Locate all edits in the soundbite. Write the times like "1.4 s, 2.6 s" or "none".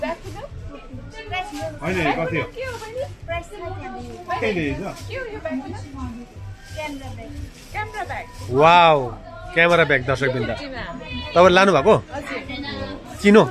none